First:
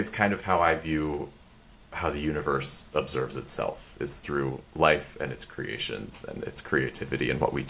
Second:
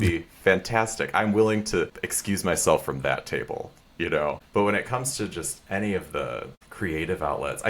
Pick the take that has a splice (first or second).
second